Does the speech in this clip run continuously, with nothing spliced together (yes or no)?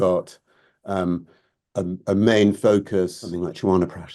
no